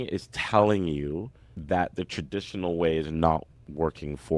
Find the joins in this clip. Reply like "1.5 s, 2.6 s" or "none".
none